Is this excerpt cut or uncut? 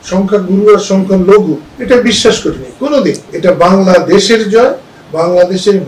cut